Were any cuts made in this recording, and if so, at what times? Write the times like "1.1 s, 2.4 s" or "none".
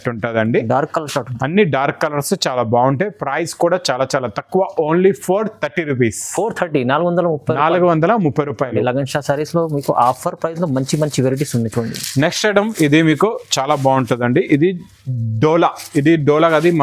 none